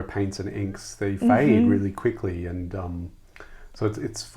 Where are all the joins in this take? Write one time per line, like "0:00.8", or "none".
none